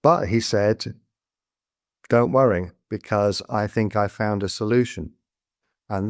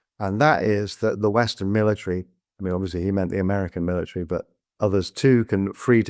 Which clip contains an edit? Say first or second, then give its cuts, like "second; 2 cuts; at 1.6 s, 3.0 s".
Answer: second; 2 cuts; at 1.3 s, 4.6 s